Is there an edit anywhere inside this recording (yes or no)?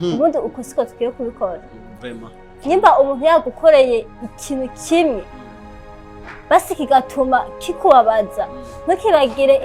no